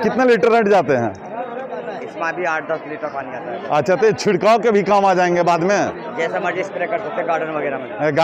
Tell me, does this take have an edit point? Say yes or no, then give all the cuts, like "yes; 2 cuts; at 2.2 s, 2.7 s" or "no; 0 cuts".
no; 0 cuts